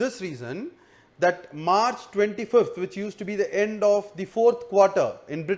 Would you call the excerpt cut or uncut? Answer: uncut